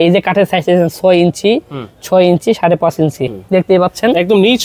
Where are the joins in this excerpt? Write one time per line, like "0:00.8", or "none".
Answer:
0:03.2